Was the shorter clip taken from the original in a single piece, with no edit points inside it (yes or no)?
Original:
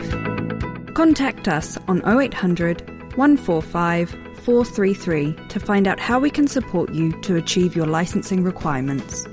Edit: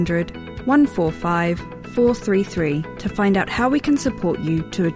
yes